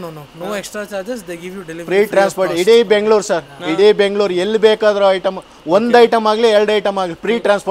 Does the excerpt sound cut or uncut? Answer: uncut